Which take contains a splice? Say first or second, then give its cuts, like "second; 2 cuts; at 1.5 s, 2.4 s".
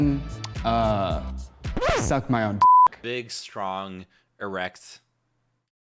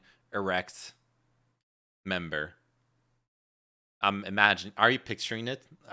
first; 1 cut; at 3.1 s